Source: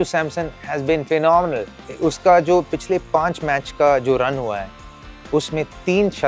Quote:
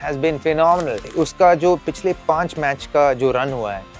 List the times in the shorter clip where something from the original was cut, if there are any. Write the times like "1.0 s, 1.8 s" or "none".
1.0 s